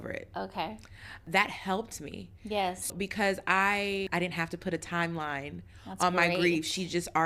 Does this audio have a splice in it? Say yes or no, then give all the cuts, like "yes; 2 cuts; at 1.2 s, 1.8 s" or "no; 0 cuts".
yes; 3 cuts; at 1.2 s, 2.9 s, 4.1 s